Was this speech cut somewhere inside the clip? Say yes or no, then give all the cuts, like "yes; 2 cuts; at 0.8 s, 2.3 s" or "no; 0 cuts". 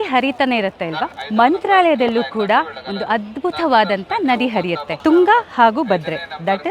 yes; 2 cuts; at 1.1 s, 4.9 s